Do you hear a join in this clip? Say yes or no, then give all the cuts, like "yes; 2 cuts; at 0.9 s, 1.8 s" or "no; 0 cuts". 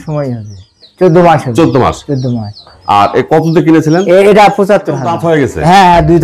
yes; 1 cut; at 5.1 s